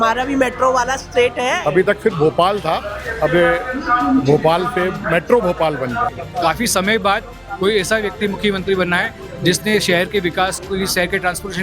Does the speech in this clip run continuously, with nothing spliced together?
no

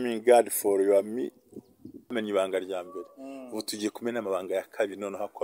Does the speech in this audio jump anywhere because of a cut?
yes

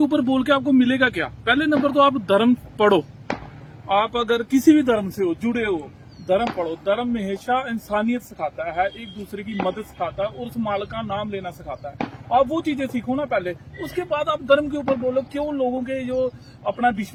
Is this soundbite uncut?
yes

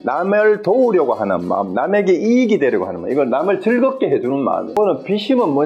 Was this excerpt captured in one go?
no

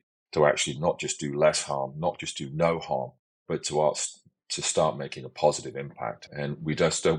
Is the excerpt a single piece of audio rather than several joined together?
no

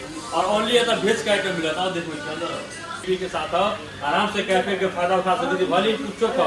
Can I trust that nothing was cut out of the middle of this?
no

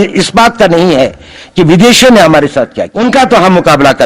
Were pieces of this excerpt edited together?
yes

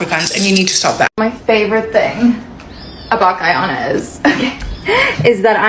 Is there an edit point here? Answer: yes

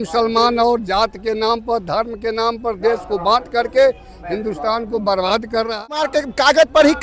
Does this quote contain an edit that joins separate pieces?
yes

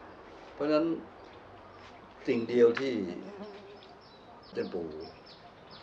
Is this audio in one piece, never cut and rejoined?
no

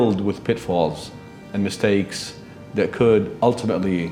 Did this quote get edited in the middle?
no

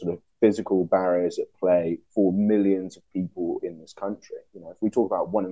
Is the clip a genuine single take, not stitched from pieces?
yes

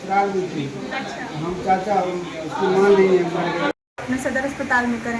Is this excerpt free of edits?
no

